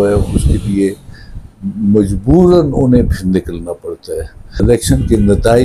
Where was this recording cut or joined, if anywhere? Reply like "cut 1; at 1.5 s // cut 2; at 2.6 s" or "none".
cut 1; at 4.4 s